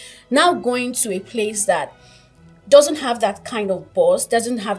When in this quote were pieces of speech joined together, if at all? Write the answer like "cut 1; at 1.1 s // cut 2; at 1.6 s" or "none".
none